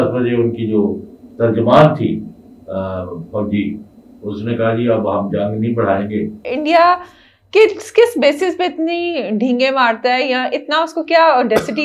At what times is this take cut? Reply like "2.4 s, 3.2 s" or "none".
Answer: 6.5 s